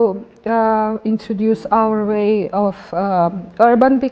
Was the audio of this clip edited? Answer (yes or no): no